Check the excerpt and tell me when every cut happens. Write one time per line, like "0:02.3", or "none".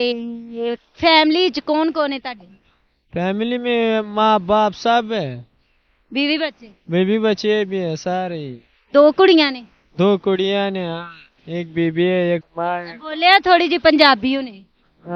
none